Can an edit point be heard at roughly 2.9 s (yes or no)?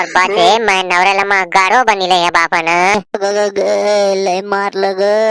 yes